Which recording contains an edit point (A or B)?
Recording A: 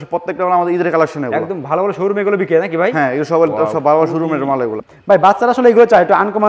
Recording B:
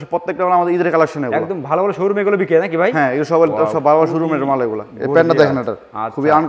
A